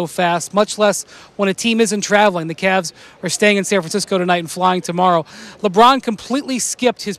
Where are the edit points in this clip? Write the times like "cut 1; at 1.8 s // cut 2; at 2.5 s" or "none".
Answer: none

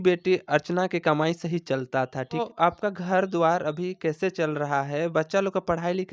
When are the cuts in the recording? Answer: cut 1; at 2.4 s

